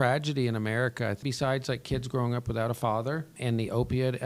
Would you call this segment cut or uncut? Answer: cut